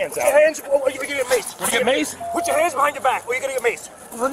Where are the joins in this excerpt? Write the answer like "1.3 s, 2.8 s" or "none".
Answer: none

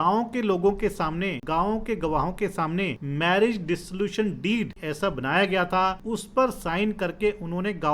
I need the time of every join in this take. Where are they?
1.4 s, 3.0 s, 4.8 s, 6.0 s

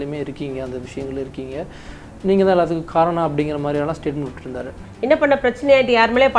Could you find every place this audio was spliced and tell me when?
4.9 s

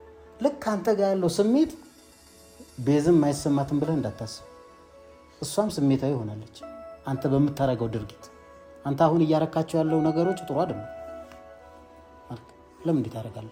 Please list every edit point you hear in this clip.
none

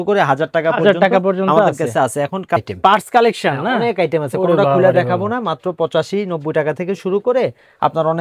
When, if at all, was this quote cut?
none

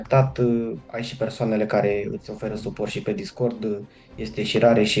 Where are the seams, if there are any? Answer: none

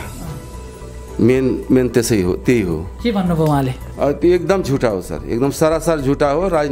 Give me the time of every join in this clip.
3.8 s

